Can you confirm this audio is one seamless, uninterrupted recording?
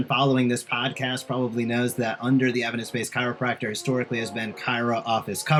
yes; 0 cuts

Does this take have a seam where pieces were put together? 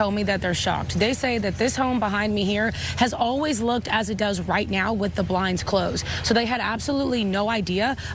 no; 0 cuts

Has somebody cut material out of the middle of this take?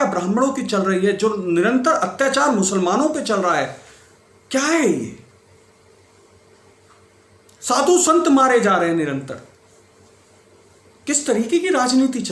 no; 0 cuts

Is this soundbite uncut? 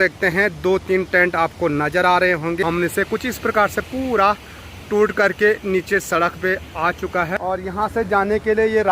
no; 2 cuts; at 2.6 s, 7.4 s

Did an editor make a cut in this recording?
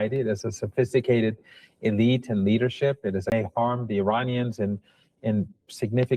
yes; 1 cut; at 3.3 s

